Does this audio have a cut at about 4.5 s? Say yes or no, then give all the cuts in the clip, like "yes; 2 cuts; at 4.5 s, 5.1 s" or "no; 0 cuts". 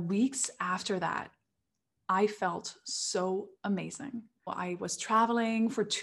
yes; 1 cut; at 4.5 s